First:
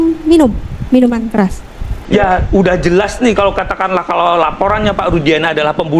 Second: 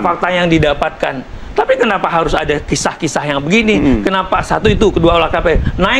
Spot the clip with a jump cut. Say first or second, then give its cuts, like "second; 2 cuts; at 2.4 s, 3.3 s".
first; 1 cut; at 1.9 s